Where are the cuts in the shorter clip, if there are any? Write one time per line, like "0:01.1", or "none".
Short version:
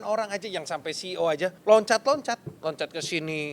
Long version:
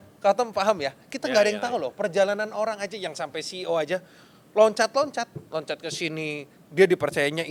0:01.6